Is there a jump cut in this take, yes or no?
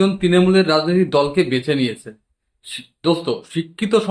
no